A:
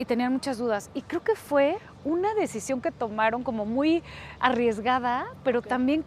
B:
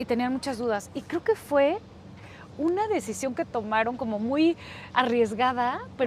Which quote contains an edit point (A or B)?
A